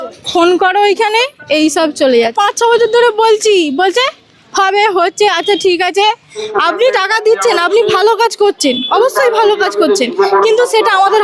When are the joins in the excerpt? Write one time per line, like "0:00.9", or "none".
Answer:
0:02.3
0:06.5